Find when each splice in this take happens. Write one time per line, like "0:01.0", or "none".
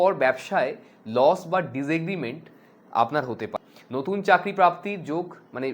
0:03.5

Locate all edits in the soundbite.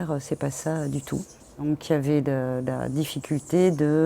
0:01.6

